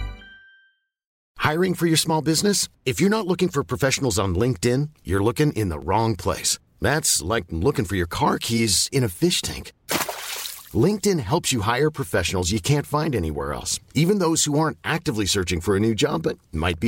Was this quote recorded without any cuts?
no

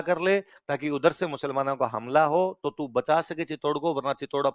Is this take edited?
no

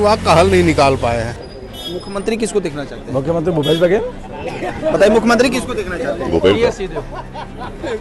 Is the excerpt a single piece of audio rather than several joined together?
no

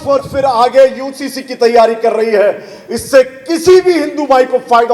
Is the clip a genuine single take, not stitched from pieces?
yes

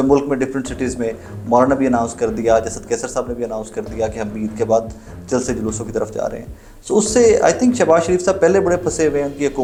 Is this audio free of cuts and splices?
yes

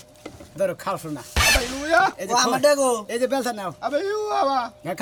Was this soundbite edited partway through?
no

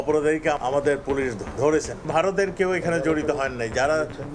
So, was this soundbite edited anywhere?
yes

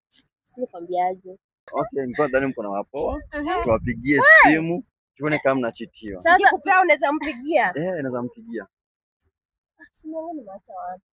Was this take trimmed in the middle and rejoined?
yes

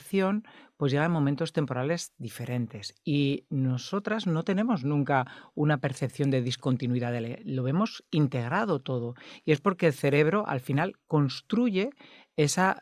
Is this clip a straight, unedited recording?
yes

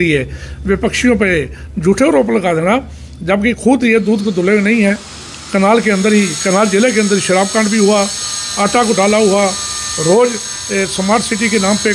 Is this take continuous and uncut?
yes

